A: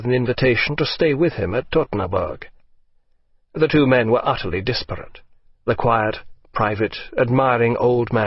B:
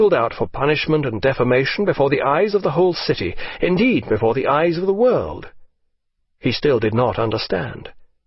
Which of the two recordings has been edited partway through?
B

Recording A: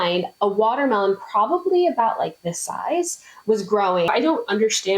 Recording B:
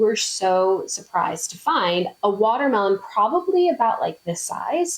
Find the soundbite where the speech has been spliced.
A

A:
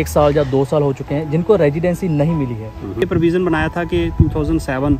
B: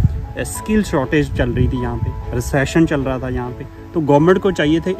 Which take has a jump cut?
A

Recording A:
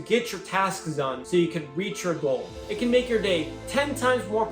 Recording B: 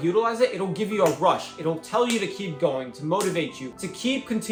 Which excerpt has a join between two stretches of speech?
A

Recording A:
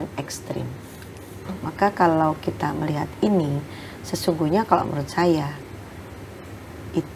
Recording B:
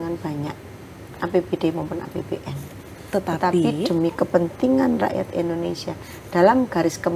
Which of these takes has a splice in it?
A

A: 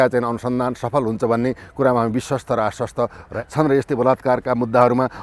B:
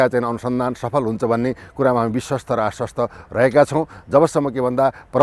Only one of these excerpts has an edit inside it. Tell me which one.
A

